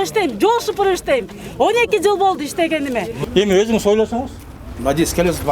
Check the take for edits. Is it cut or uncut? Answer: cut